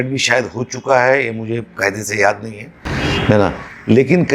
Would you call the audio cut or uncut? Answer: uncut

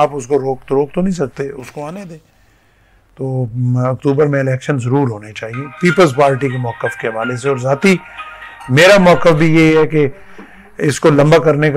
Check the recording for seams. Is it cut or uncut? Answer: uncut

